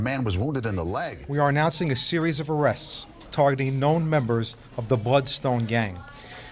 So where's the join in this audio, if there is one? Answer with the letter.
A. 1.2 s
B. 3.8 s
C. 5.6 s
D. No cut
A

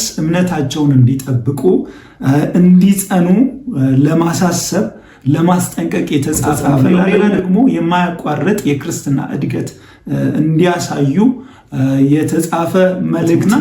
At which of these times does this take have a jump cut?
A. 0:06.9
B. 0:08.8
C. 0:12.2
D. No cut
A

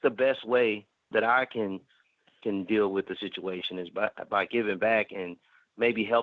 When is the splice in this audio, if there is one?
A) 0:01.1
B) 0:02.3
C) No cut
A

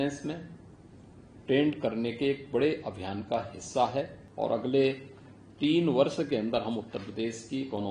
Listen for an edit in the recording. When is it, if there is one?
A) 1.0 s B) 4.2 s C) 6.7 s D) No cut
B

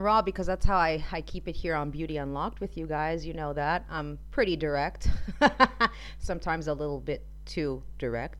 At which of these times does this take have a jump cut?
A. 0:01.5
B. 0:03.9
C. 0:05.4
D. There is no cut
D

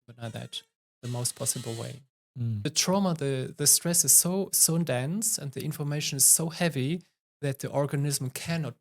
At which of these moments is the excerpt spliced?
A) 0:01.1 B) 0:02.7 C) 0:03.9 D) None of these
B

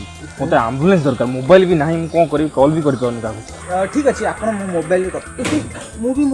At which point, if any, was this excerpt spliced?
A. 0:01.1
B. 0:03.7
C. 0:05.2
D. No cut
C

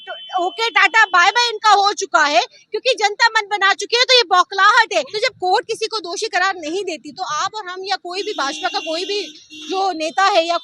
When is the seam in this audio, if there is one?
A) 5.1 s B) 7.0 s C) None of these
A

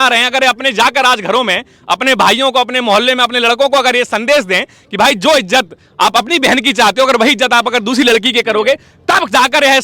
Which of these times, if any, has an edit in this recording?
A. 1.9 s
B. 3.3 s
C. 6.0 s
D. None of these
D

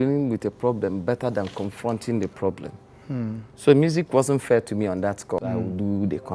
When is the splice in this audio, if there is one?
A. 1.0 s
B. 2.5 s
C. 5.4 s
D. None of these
C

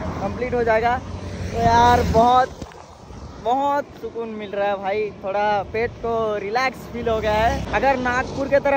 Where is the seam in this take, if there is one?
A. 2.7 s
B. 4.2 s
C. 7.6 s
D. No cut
C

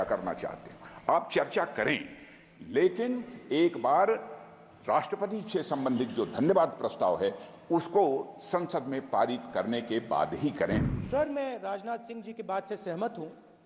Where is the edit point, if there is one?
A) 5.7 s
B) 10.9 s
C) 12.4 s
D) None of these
B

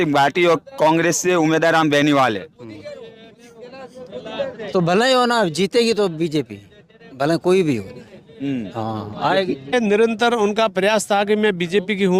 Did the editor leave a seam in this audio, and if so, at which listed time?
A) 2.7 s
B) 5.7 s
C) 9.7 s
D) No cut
C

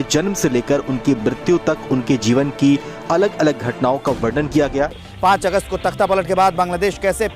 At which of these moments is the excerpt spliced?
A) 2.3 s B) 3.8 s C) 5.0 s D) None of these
C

